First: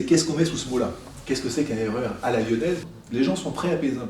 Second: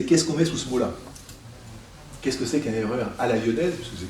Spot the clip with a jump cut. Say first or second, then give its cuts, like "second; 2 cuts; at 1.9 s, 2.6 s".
first; 2 cuts; at 1.1 s, 2.9 s